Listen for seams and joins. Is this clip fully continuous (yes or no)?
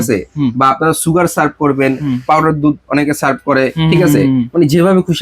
yes